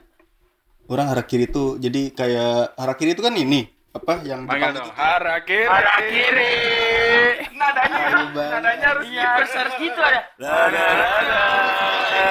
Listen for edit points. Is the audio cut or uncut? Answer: uncut